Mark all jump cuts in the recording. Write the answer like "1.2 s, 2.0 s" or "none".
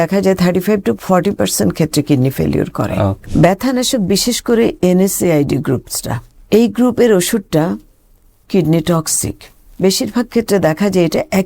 3.2 s